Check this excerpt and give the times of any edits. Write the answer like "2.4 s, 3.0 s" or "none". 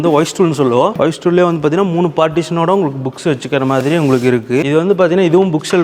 0.9 s, 4.7 s